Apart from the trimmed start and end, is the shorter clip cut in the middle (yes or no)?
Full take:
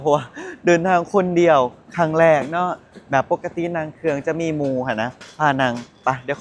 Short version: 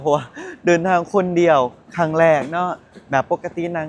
no